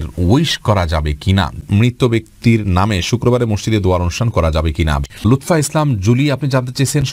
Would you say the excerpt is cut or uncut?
cut